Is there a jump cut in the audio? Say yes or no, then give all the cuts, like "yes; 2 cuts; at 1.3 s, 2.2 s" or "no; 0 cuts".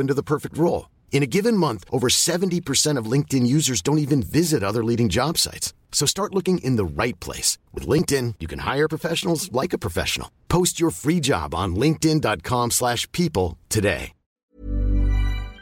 yes; 1 cut; at 14.6 s